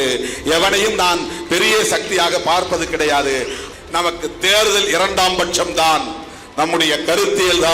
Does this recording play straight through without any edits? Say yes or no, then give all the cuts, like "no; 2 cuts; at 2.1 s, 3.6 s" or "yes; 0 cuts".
no; 1 cut; at 3.6 s